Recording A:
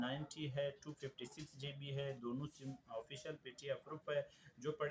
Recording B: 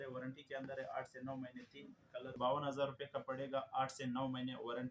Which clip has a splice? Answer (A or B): B